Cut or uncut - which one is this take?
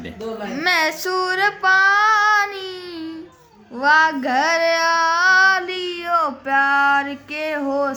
uncut